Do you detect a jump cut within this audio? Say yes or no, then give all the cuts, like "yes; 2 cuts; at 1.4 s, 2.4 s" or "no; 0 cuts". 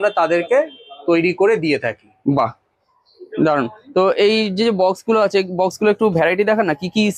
no; 0 cuts